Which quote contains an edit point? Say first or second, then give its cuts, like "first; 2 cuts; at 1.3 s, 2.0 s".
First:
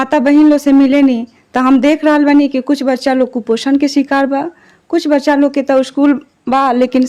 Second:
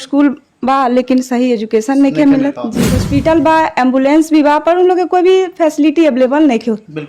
second; 1 cut; at 3.0 s